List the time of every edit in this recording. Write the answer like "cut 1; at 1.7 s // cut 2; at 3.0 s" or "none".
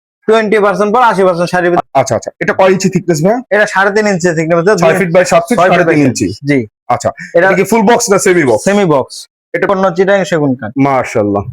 cut 1; at 1.8 s // cut 2; at 9.7 s